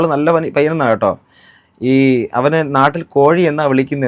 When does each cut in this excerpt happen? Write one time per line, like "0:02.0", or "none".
none